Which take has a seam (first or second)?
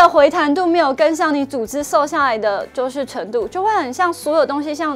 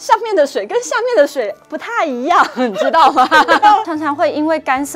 second